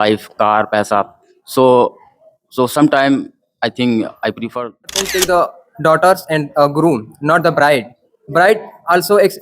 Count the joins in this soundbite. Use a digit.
1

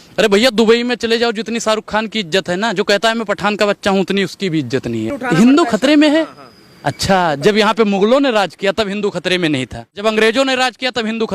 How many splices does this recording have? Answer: 2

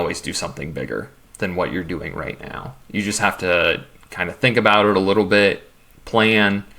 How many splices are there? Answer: 1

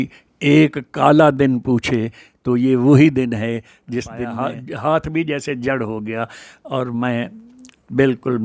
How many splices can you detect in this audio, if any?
1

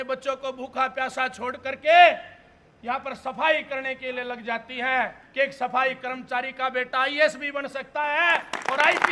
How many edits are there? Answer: 1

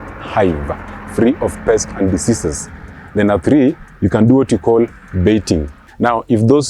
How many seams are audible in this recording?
1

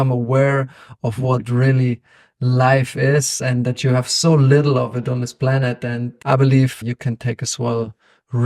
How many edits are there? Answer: 2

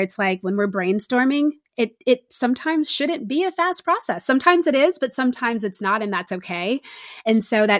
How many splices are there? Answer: 0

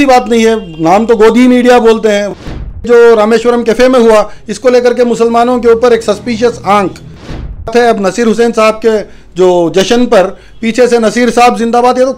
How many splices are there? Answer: 2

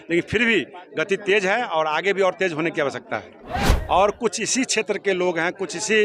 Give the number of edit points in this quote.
1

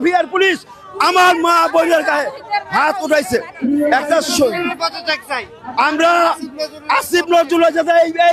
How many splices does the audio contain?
0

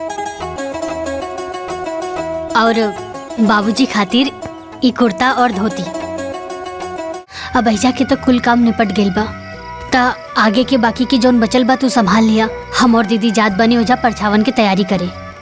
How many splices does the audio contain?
1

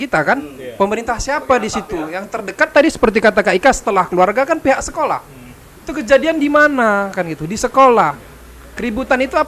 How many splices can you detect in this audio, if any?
0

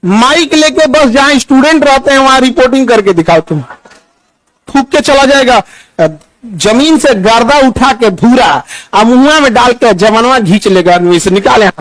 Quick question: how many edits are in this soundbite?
1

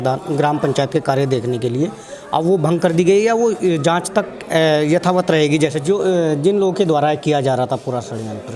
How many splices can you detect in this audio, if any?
1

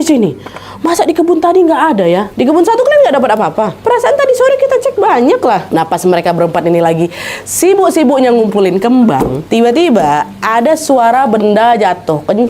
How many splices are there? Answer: 3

